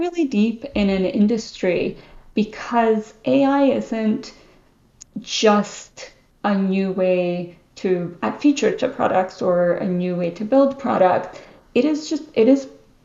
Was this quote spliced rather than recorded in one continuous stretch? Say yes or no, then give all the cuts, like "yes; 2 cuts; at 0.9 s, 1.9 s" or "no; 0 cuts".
no; 0 cuts